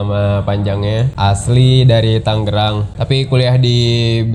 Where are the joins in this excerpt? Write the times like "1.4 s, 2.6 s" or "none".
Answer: 1.1 s, 2.9 s